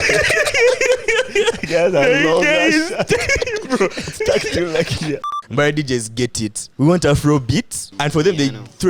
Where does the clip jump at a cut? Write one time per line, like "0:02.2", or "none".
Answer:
0:05.2
0:06.6
0:07.8